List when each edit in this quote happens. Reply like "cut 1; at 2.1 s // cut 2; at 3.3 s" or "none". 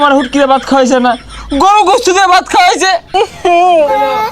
cut 1; at 3.1 s